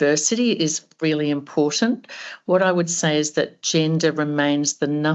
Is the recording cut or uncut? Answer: uncut